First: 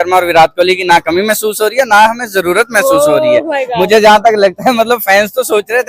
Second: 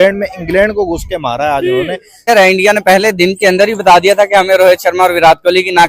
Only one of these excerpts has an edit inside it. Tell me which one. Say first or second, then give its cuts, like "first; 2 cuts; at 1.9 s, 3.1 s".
second; 1 cut; at 2.3 s